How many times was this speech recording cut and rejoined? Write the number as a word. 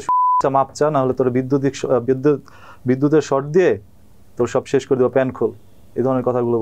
zero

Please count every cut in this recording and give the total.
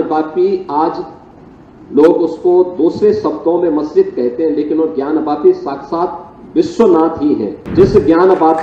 one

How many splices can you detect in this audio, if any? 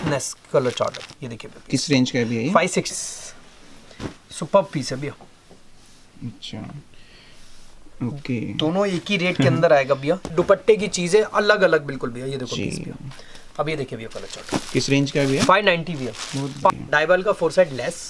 three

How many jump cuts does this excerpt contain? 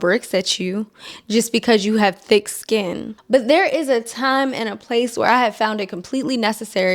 one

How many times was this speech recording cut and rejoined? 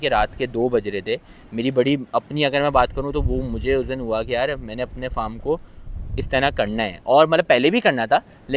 zero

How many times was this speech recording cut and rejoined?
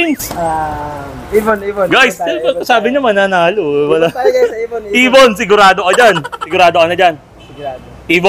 one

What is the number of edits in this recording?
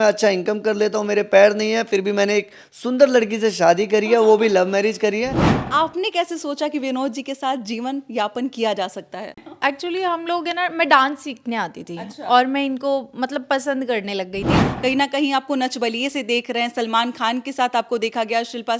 three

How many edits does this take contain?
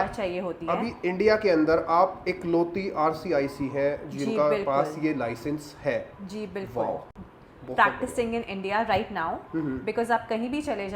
zero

